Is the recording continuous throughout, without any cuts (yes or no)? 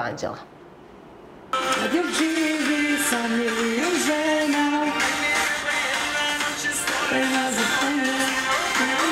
no